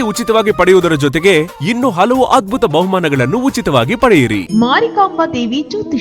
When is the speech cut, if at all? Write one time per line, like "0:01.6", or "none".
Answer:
0:04.5